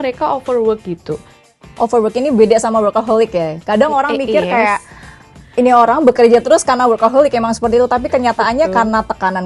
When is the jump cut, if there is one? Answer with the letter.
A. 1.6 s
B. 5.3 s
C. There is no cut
A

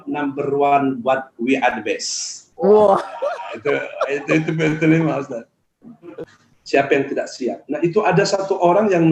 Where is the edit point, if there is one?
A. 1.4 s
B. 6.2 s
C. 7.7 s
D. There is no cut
B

